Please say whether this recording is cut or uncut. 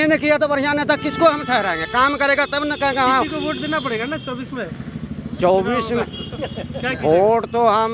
uncut